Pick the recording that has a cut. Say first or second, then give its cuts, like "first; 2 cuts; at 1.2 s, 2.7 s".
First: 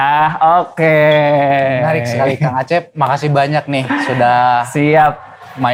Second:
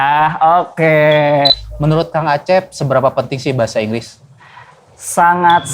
second; 1 cut; at 1.5 s